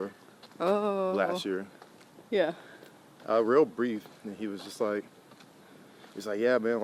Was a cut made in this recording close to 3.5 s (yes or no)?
no